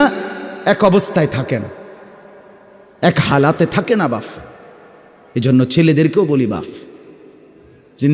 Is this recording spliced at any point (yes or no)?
no